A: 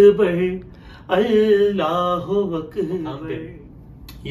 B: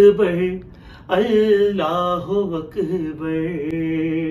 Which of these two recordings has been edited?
A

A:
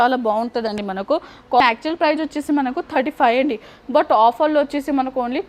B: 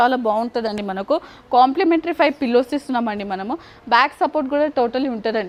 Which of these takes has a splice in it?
A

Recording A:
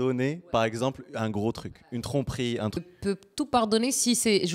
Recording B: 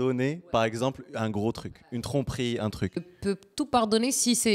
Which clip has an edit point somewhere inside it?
A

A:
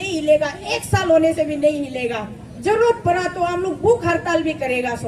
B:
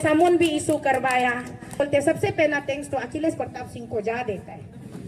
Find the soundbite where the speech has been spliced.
B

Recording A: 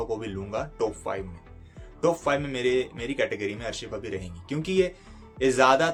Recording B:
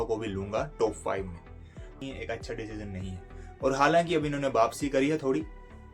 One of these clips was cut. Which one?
B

